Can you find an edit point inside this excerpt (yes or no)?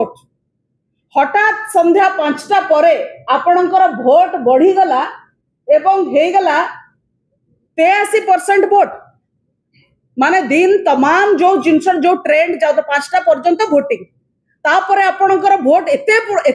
no